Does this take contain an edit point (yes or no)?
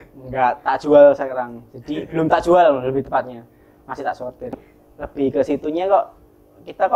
yes